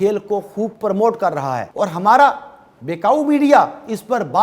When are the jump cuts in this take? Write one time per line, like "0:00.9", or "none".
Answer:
0:01.7